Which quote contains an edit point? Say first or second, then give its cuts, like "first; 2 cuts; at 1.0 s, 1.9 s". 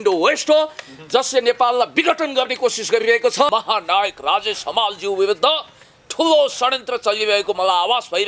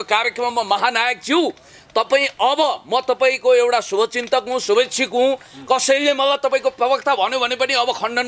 first; 1 cut; at 3.5 s